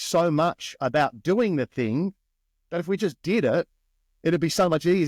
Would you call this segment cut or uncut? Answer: uncut